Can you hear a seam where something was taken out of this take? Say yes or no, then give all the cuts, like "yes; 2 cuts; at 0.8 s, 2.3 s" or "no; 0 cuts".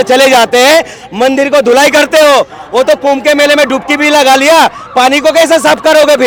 no; 0 cuts